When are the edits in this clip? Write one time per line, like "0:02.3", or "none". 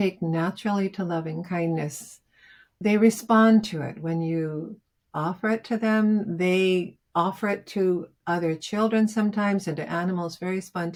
none